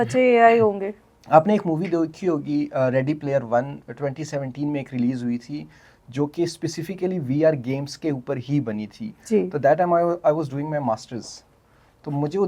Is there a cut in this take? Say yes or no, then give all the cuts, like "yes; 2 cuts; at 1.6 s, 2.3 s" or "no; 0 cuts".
no; 0 cuts